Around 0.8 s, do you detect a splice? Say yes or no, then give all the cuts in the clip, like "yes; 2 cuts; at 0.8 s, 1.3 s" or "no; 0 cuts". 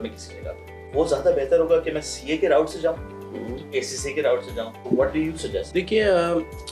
yes; 4 cuts; at 0.8 s, 3.7 s, 4.8 s, 5.7 s